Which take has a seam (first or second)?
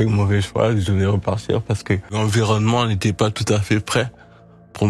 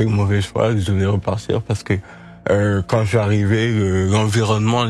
first